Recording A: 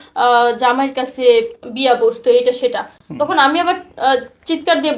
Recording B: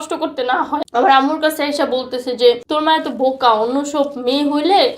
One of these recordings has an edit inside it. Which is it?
B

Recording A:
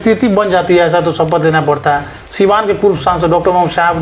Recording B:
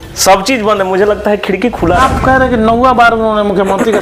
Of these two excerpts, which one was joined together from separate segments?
B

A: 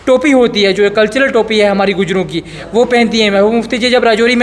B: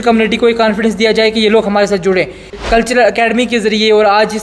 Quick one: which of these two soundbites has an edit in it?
B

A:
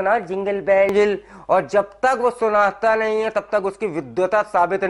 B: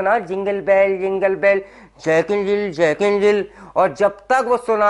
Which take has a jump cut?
A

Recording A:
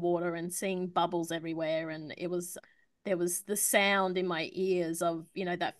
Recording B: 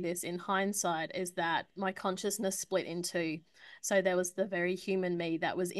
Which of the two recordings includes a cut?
A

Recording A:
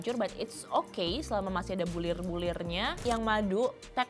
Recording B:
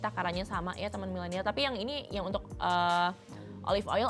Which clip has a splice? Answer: A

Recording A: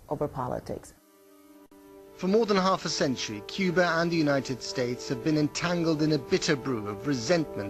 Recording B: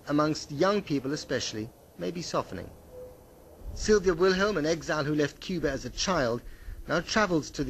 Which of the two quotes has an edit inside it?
A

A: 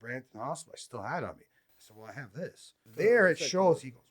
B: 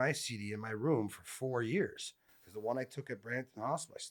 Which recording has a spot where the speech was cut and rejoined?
A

